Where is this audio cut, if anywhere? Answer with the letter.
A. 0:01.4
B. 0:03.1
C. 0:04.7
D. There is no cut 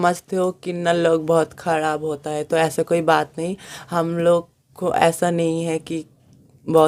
D